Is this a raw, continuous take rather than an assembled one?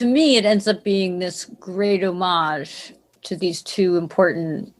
yes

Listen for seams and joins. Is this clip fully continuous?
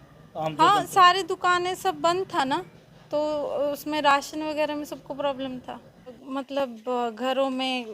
no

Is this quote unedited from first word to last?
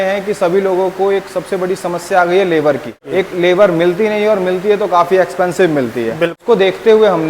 no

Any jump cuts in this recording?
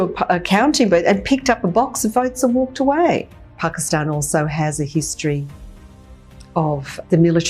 yes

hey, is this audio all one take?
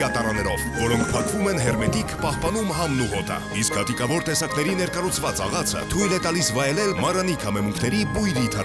yes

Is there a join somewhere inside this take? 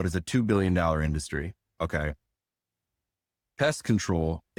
no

